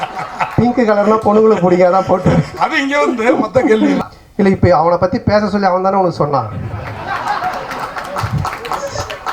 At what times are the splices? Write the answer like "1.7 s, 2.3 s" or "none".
4.0 s